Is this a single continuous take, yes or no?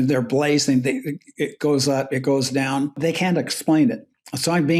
no